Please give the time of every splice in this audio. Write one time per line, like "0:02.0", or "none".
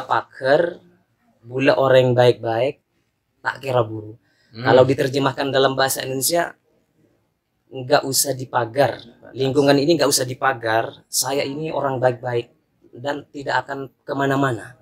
none